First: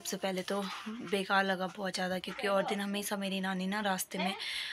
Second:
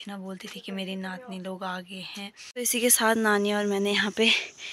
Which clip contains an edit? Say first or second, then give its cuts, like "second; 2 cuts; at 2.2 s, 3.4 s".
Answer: second; 1 cut; at 2.5 s